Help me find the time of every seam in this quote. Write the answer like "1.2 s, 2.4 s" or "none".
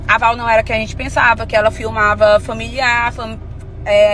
none